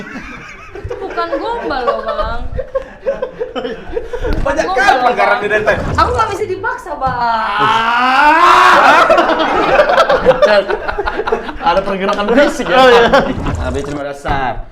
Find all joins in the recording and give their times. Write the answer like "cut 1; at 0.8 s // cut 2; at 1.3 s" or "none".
cut 1; at 5.9 s // cut 2; at 13.5 s